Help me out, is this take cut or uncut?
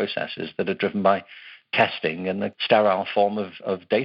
cut